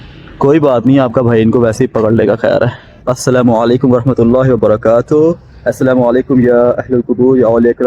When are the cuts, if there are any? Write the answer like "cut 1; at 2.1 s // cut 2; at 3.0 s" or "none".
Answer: cut 1; at 3.1 s

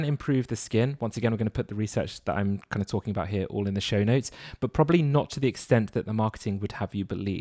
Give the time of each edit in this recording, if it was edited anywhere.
none

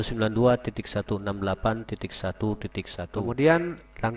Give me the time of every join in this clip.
cut 1; at 3.2 s

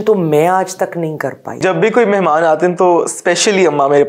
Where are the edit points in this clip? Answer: cut 1; at 1.6 s

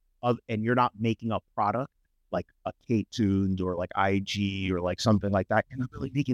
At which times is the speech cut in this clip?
none

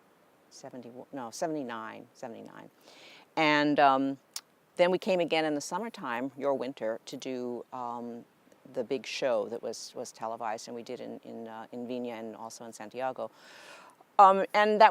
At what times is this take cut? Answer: cut 1; at 13.4 s

